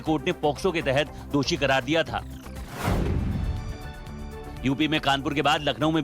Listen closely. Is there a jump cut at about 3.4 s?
yes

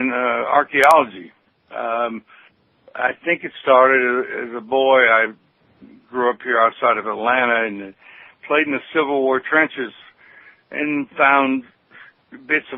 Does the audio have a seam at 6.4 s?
yes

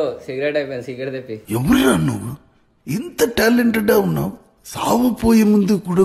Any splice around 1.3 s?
yes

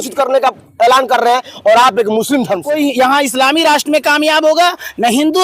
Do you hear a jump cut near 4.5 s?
no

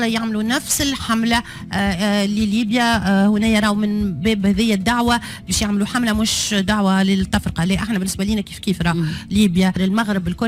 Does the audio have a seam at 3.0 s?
no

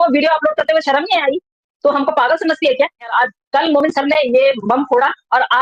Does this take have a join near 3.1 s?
yes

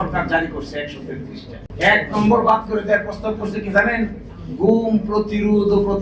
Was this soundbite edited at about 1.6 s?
yes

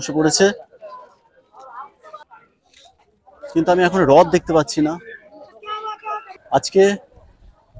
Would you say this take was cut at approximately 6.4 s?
yes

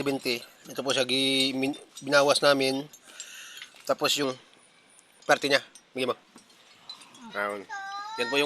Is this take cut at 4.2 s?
yes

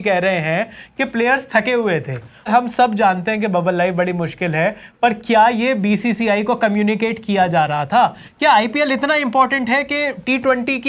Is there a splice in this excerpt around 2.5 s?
yes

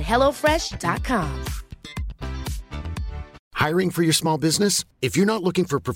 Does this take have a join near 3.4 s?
yes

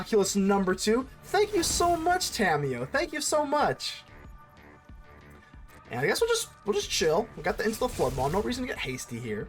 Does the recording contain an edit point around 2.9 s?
no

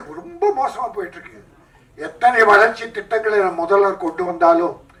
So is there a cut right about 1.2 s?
no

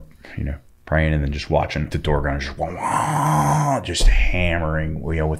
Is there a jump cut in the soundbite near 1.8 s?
yes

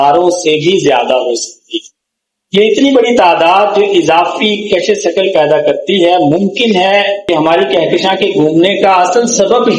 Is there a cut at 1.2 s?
no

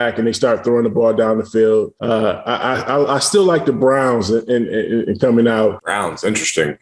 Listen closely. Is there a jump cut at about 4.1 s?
no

